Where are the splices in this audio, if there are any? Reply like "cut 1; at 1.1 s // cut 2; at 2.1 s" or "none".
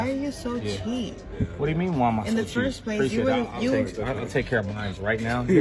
cut 1; at 3.3 s